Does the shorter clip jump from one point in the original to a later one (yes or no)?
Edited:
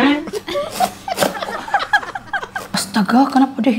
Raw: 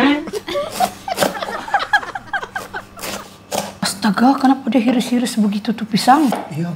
yes